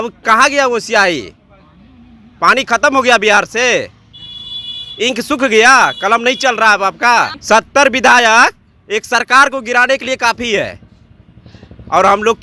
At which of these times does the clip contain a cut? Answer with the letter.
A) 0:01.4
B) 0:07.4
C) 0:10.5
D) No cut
B